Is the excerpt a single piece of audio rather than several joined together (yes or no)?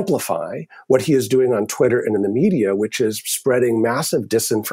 yes